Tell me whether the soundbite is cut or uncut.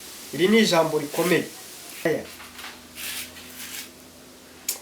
cut